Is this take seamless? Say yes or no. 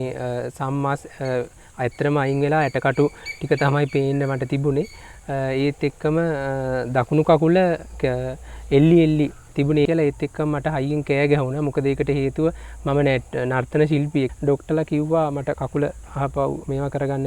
no